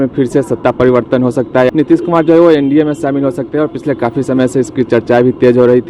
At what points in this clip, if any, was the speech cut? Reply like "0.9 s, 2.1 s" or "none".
1.7 s